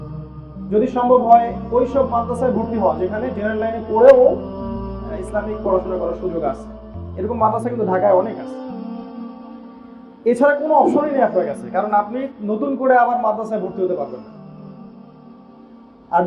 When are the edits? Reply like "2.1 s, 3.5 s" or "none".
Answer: 8.4 s, 10.2 s, 14.1 s, 15.5 s